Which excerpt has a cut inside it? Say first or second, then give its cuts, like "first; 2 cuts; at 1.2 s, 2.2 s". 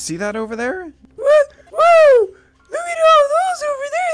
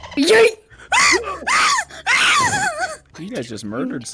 second; 1 cut; at 3.1 s